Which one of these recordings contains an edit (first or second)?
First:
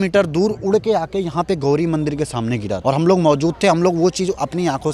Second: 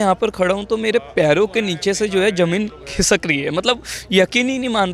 first